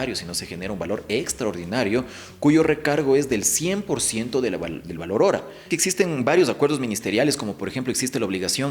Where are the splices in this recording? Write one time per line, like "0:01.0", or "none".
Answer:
0:05.7